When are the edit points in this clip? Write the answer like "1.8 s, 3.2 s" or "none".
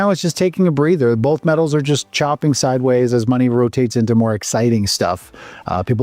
none